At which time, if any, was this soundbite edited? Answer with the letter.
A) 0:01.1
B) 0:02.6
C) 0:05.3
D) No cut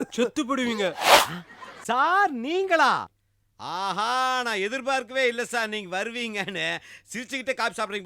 A